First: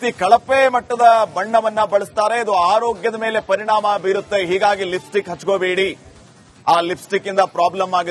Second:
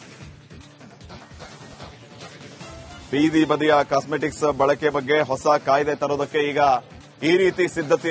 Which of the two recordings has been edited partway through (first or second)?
second